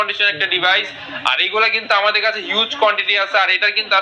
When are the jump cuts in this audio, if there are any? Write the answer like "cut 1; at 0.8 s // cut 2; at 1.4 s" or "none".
none